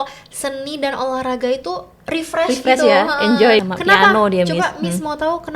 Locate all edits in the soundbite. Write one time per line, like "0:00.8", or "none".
0:03.6